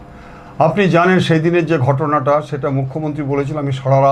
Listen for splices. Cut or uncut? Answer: uncut